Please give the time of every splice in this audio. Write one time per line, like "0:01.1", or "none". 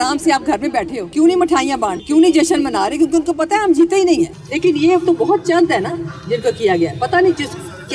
0:01.0
0:02.0
0:04.4